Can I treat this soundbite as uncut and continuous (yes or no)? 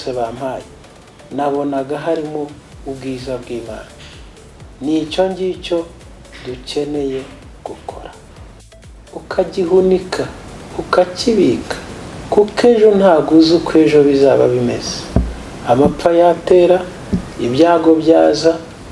no